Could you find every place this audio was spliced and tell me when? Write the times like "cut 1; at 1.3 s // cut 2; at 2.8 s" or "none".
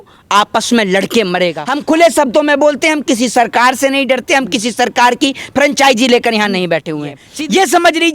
cut 1; at 1.7 s // cut 2; at 7.2 s